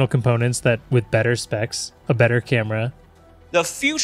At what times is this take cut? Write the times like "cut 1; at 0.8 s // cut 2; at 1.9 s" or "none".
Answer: cut 1; at 3.0 s